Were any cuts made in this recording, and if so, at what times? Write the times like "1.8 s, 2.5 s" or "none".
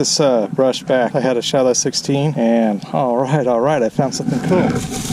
1.1 s, 2.3 s